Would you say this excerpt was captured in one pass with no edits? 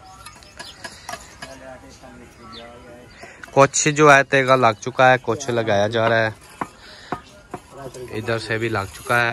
yes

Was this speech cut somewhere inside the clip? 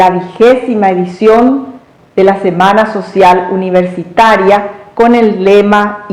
no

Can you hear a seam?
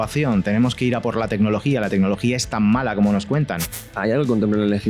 yes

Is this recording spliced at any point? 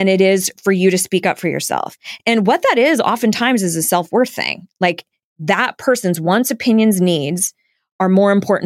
yes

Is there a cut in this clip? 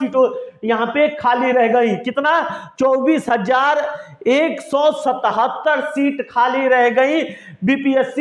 no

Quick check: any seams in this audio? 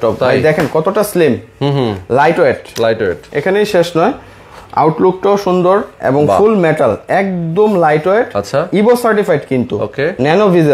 no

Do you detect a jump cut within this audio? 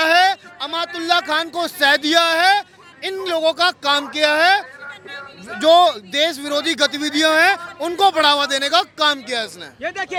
no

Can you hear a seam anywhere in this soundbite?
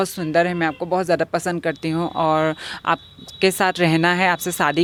no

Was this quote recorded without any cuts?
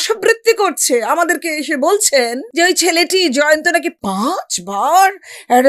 no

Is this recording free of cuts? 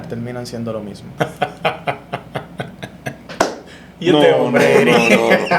no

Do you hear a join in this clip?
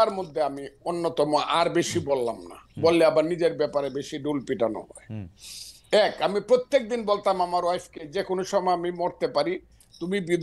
no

